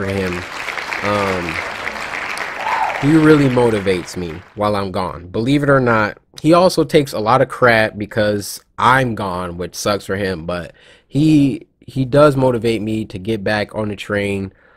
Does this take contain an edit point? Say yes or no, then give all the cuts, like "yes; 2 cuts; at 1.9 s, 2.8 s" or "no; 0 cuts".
no; 0 cuts